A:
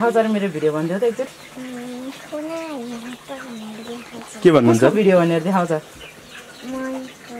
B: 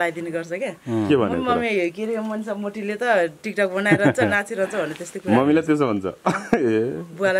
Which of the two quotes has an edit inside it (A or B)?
A